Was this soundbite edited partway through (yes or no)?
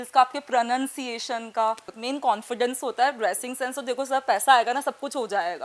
yes